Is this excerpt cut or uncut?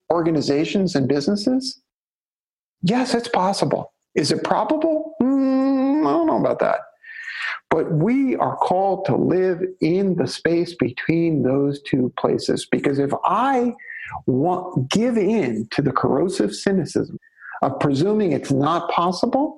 cut